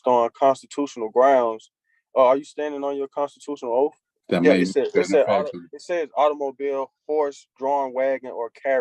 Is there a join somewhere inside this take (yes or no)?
yes